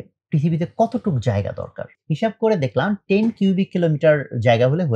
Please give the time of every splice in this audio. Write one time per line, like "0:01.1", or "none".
0:01.9